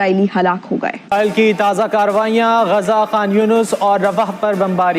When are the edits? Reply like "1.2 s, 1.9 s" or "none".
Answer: 1.1 s